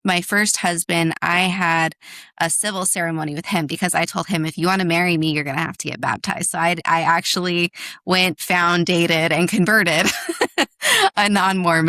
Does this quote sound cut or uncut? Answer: uncut